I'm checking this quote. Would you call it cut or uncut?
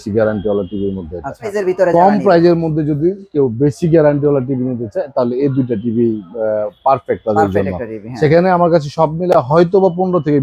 cut